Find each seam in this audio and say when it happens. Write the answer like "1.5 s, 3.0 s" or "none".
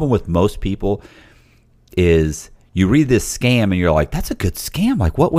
none